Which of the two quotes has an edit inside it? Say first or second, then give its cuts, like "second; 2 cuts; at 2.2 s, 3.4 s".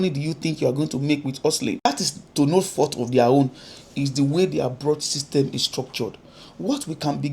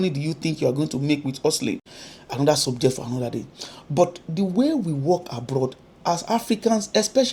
first; 1 cut; at 1.9 s